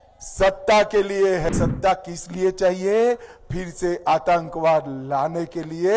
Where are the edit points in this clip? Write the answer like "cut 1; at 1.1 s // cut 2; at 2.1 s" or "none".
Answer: cut 1; at 1.5 s